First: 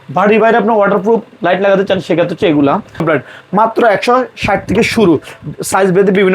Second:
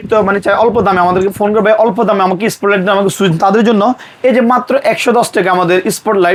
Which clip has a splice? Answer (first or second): first